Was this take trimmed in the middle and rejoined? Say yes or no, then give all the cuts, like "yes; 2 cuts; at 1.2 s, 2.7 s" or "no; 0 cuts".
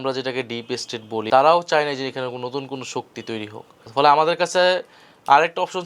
yes; 2 cuts; at 1.1 s, 3.7 s